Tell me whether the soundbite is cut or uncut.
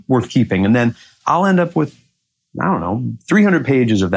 uncut